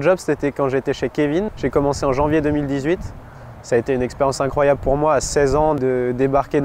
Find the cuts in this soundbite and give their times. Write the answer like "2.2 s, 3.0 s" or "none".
1.5 s